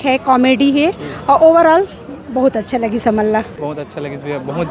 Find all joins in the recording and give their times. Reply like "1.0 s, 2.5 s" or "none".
3.5 s